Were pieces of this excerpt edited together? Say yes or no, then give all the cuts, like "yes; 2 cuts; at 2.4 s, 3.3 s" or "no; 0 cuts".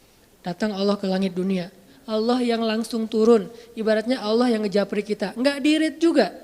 yes; 1 cut; at 1.9 s